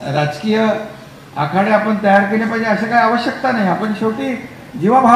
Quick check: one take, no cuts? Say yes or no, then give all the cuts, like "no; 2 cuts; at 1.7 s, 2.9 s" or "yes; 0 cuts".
yes; 0 cuts